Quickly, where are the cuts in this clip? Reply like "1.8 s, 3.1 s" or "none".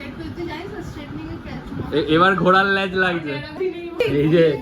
3.6 s